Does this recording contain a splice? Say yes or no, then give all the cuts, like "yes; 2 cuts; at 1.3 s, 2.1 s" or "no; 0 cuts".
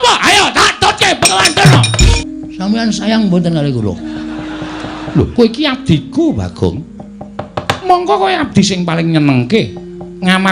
yes; 2 cuts; at 2.2 s, 5.1 s